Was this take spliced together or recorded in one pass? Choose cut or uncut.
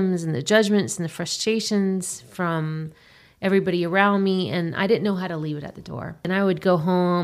cut